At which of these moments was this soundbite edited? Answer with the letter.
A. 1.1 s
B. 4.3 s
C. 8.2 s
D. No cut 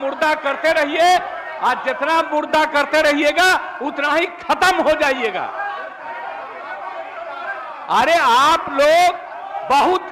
D